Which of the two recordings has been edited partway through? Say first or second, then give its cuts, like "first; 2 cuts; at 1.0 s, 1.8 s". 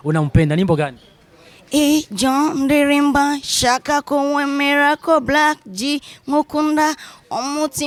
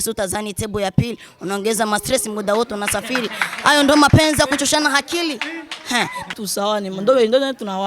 second; 1 cut; at 6.3 s